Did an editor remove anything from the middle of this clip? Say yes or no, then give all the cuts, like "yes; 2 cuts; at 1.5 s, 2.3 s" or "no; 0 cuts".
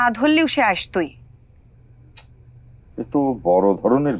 no; 0 cuts